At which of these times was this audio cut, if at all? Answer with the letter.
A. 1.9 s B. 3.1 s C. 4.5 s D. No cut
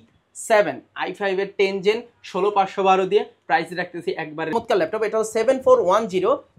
C